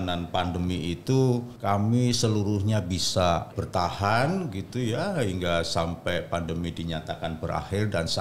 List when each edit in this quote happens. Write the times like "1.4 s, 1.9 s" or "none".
1.5 s, 3.6 s